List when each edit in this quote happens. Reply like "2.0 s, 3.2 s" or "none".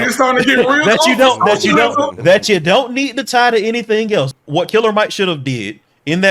4.3 s

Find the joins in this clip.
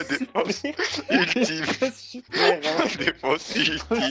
none

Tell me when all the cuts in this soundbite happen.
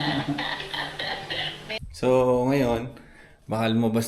1.7 s

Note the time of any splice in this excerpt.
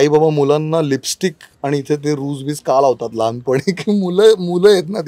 none

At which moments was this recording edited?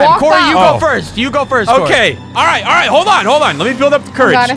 none

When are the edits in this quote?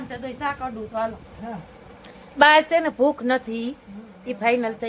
1.3 s

